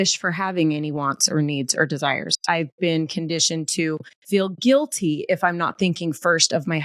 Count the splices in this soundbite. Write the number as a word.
one